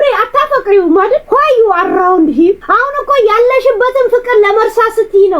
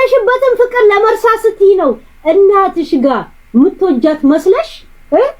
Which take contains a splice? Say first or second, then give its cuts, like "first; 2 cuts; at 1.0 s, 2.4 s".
first; 2 cuts; at 1.2 s, 2.6 s